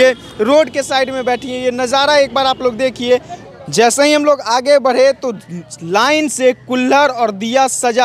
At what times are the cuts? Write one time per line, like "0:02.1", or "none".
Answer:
0:03.5